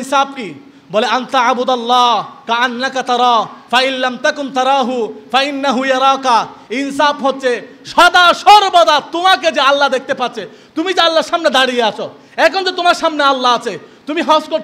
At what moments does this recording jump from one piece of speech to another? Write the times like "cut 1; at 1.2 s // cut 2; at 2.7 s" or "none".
none